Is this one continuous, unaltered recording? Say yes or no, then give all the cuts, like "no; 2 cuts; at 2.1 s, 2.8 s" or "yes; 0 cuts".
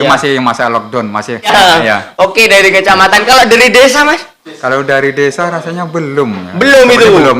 no; 1 cut; at 1.5 s